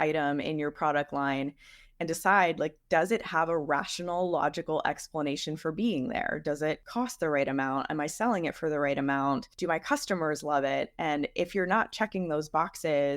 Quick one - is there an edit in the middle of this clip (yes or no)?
yes